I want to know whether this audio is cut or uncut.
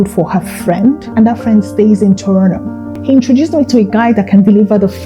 cut